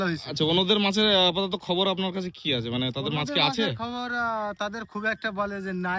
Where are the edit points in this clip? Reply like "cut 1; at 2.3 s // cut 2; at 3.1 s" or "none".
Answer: none